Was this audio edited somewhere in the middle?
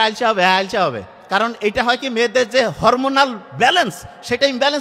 no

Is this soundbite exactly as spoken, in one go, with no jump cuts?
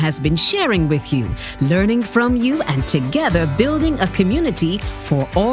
yes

